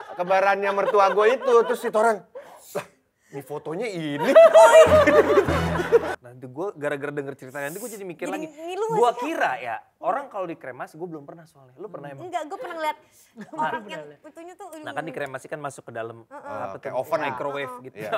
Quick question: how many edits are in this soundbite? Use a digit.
1